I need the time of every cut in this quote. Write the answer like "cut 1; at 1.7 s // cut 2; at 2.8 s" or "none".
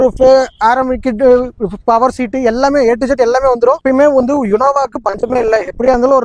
cut 1; at 3.8 s